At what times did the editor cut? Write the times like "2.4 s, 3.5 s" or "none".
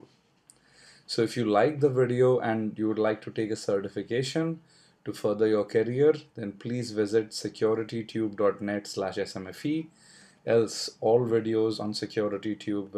none

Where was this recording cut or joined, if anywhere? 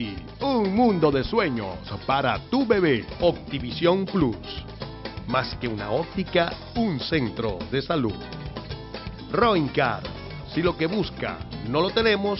3.1 s

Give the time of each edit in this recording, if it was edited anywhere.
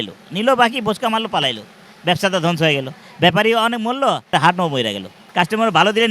4.3 s, 5.2 s

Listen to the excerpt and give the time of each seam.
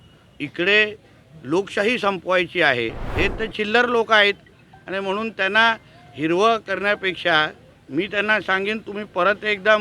3.0 s

